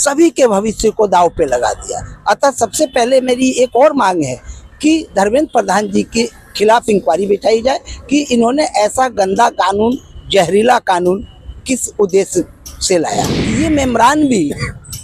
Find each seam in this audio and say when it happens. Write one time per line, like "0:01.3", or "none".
0:13.4